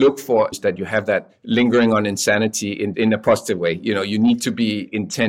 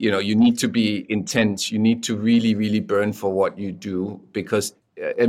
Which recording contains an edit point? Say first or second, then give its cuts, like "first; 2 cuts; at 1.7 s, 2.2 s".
first; 2 cuts; at 1.1 s, 2.9 s